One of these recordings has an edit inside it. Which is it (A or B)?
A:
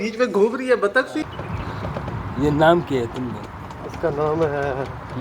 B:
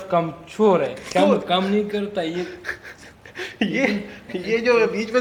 A